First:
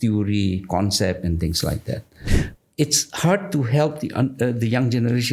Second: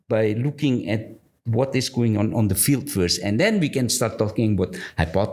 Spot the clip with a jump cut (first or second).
first